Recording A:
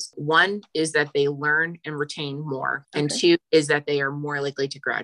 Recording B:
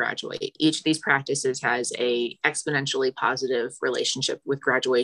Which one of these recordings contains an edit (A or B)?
A